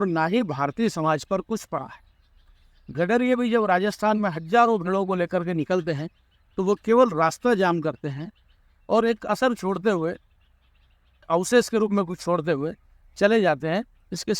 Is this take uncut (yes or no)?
no